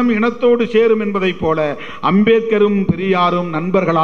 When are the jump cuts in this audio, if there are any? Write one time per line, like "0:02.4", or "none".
none